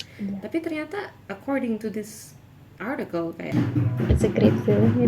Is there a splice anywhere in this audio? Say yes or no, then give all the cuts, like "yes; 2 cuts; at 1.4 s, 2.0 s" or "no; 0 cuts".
yes; 1 cut; at 3.5 s